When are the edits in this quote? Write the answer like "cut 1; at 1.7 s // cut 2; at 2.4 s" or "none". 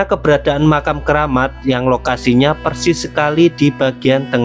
none